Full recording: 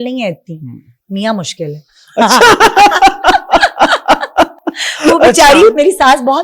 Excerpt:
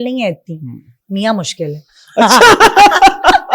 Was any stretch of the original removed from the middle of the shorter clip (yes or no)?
no